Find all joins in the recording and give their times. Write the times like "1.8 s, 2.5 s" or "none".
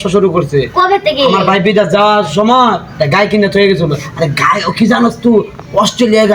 none